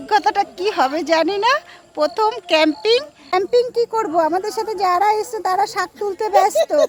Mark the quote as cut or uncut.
uncut